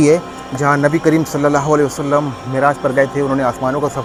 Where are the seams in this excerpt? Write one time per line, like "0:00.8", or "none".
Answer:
none